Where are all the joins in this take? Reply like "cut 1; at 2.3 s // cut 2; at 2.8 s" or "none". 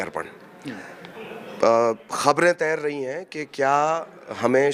none

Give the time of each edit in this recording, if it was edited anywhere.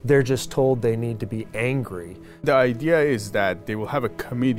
cut 1; at 2.4 s

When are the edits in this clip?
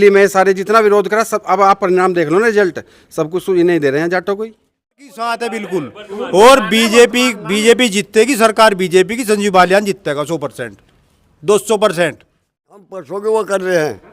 cut 1; at 5.3 s // cut 2; at 13.0 s

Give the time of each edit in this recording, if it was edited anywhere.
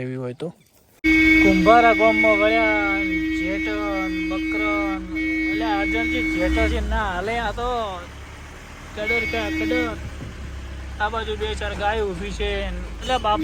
cut 1; at 0.9 s

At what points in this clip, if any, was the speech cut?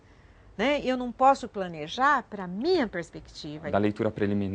cut 1; at 3.6 s

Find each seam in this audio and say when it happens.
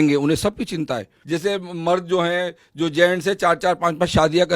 cut 1; at 1.1 s

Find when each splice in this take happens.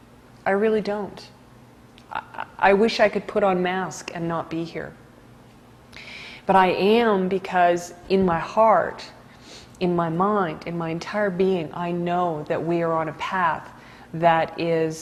none

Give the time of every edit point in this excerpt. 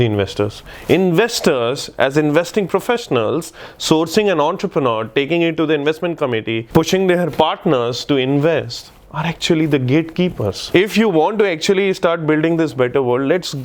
cut 1; at 10.6 s

